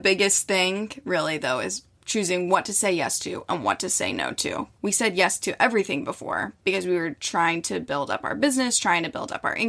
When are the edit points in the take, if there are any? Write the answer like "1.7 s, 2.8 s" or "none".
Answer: 4.7 s